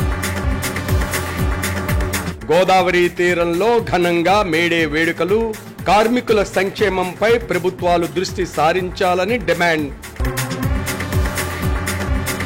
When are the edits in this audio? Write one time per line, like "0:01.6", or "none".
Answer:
none